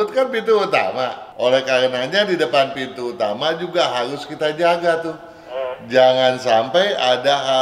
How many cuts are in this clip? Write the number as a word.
one